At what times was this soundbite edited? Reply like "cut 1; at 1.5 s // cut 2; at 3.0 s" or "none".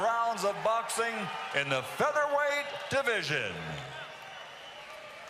cut 1; at 1.1 s